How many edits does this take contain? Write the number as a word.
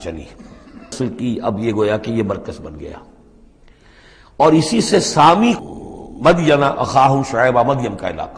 two